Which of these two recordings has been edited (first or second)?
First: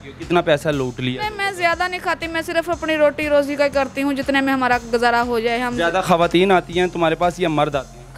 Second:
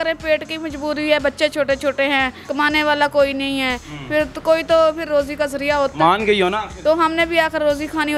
second